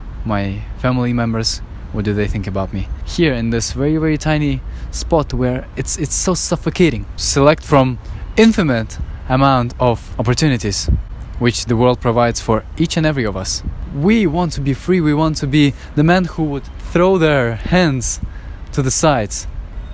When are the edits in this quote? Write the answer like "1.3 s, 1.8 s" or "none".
3.0 s, 7.1 s, 10.1 s, 13.9 s